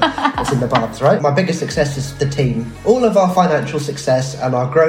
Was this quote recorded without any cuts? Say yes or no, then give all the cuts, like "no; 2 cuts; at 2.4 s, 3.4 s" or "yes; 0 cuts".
no; 2 cuts; at 1.2 s, 2.7 s